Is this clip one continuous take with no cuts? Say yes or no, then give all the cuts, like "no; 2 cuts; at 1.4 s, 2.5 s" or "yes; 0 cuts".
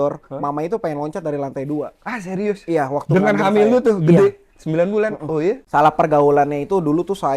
no; 1 cut; at 5.6 s